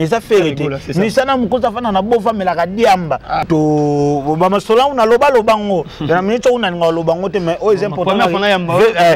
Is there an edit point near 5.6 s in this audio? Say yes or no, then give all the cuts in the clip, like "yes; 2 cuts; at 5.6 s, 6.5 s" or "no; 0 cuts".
no; 1 cut; at 3.4 s